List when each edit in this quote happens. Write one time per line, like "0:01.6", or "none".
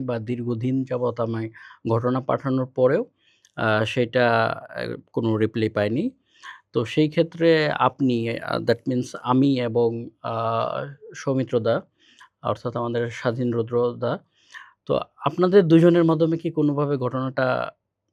none